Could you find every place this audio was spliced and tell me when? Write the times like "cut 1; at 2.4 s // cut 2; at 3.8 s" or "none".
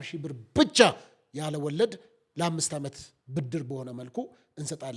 none

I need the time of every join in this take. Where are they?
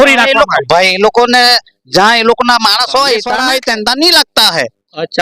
cut 1; at 3.4 s

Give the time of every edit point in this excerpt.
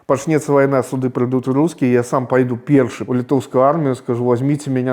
cut 1; at 3.0 s

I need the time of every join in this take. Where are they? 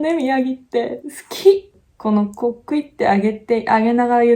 none

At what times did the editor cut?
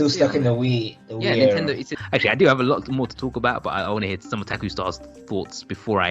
cut 1; at 1.9 s // cut 2; at 4.6 s

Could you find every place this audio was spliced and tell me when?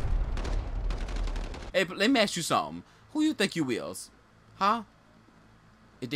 cut 1; at 1.6 s

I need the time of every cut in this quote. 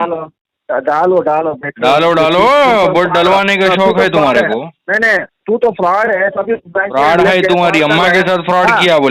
none

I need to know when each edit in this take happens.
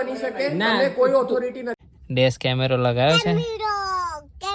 cut 1; at 1.7 s

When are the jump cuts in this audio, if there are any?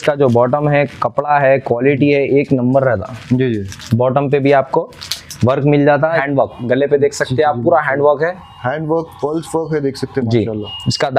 cut 1; at 6.1 s

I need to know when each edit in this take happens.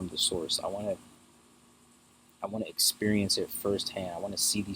none

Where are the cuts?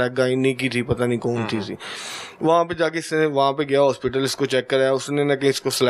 none

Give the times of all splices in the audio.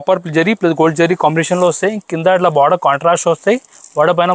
none

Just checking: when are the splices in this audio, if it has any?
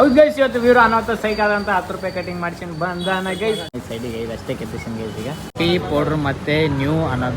cut 1; at 3.8 s // cut 2; at 5.5 s

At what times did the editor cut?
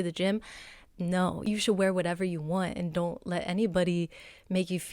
cut 1; at 1.4 s

